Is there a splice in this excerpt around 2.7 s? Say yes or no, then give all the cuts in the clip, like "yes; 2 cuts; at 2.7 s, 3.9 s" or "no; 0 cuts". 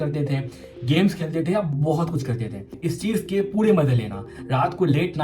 yes; 1 cut; at 2.7 s